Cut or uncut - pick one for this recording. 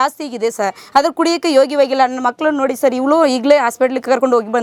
uncut